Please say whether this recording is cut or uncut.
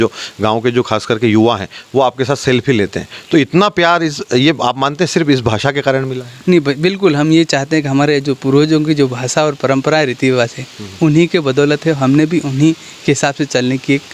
uncut